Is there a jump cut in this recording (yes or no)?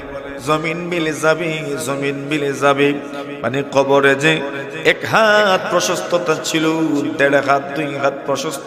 no